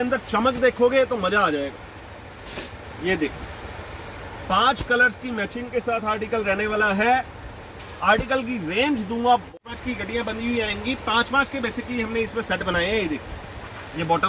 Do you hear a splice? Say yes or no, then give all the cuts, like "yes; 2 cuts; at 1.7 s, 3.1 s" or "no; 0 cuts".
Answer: yes; 1 cut; at 9.5 s